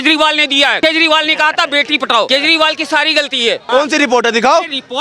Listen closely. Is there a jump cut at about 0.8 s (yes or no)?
yes